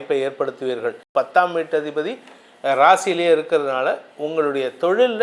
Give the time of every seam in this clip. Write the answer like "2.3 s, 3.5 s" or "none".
1.0 s